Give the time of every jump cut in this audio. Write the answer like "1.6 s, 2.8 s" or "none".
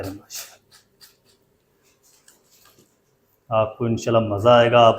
none